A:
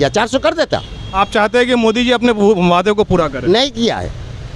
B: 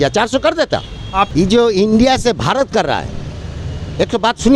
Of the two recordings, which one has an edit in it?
B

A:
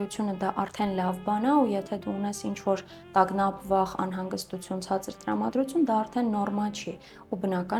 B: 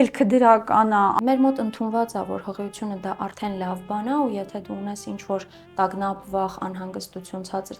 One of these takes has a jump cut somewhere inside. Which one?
B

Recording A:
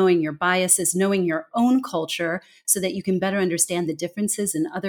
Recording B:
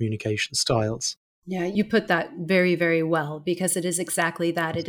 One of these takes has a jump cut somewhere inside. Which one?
B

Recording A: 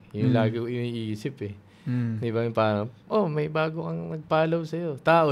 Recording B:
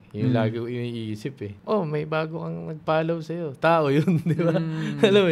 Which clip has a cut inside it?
B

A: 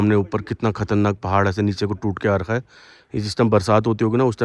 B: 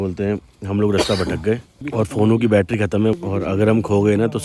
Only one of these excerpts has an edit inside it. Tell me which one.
B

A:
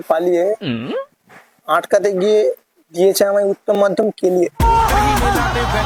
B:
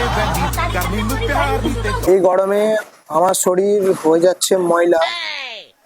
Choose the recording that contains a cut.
B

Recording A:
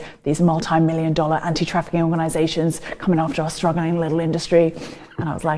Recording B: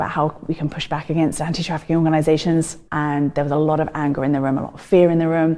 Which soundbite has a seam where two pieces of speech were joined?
B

